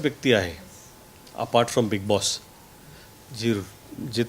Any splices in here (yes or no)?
no